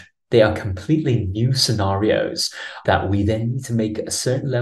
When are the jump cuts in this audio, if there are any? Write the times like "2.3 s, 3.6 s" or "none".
2.8 s